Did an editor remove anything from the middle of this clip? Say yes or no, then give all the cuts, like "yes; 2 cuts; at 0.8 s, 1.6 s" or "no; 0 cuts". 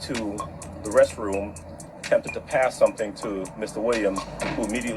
no; 0 cuts